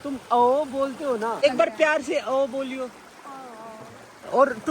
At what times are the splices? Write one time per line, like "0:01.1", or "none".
0:01.4